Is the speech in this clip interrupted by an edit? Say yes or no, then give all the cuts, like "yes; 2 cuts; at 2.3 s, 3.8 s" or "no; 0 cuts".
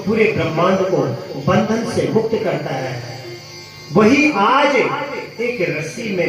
no; 0 cuts